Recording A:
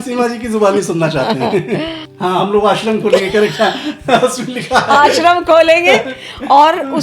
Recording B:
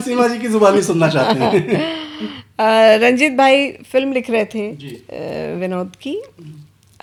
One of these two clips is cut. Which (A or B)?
A